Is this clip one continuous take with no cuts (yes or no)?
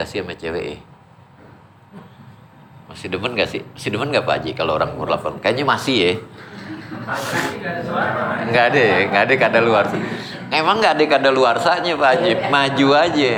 yes